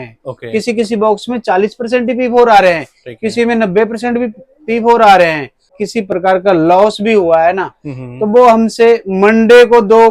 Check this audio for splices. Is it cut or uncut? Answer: cut